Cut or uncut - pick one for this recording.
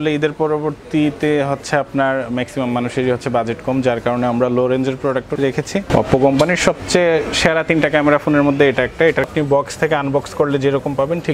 cut